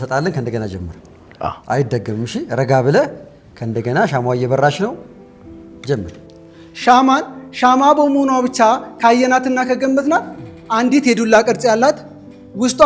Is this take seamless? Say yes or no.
yes